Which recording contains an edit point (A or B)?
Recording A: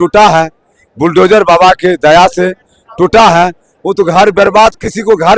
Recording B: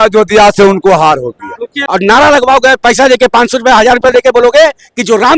B